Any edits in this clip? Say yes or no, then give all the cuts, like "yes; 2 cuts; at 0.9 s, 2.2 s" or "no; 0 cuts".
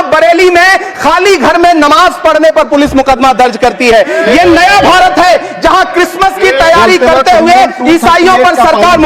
no; 0 cuts